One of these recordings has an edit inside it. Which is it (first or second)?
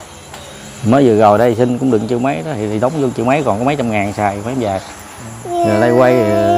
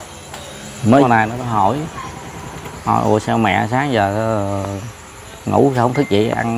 second